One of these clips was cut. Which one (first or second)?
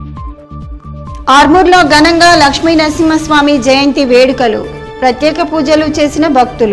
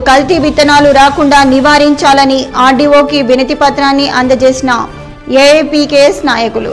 first